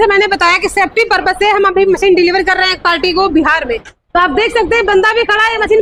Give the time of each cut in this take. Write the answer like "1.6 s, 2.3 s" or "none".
none